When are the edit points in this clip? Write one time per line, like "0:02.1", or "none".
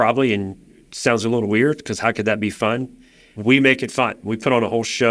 none